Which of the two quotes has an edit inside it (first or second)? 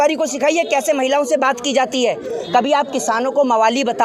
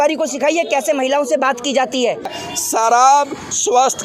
second